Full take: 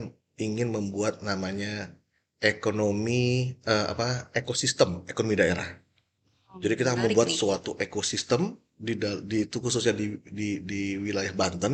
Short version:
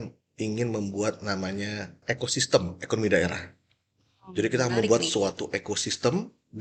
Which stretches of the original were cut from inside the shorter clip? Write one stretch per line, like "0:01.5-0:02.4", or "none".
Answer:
0:02.0-0:04.2